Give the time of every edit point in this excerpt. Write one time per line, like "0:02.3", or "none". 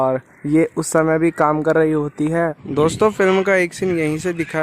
0:02.6